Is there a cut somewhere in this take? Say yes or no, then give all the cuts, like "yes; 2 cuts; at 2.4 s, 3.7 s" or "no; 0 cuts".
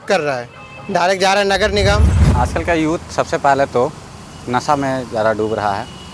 yes; 1 cut; at 2.1 s